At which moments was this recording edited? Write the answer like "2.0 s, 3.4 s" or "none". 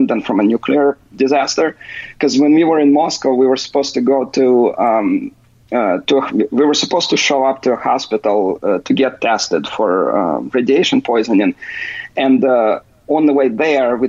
none